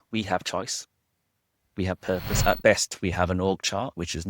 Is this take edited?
yes; 1 cut; at 2.4 s

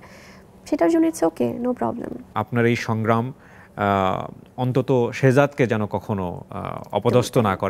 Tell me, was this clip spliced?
yes; 1 cut; at 2.3 s

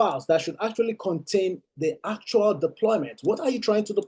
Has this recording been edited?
no; 0 cuts

